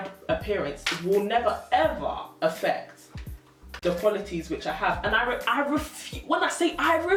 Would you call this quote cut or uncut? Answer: uncut